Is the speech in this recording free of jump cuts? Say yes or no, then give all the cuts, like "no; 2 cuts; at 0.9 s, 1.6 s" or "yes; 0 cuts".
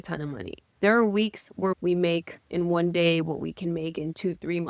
no; 1 cut; at 1.8 s